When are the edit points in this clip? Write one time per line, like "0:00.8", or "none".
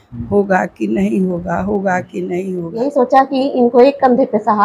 0:02.7